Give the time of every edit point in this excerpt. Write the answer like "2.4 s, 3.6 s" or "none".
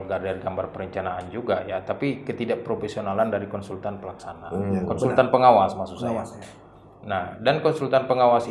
none